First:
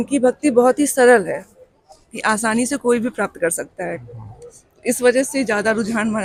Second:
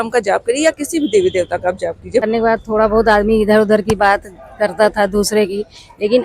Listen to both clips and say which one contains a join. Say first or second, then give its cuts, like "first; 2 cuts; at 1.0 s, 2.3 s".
second; 1 cut; at 2.2 s